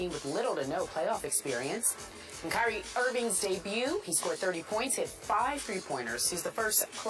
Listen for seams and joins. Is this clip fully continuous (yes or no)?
yes